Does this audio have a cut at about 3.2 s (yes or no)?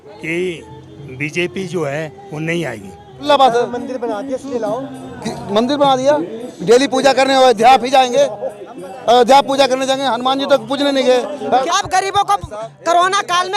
yes